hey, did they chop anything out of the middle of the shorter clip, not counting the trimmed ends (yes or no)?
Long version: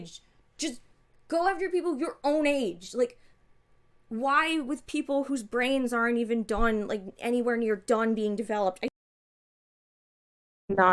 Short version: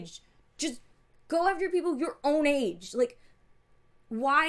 no